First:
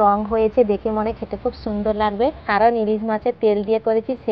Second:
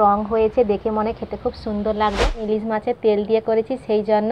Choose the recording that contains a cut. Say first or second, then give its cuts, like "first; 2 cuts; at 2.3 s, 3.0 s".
second; 1 cut; at 2.4 s